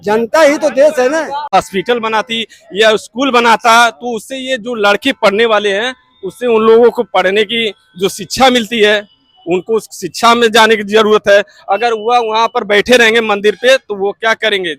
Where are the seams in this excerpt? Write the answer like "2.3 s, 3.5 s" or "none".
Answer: 1.5 s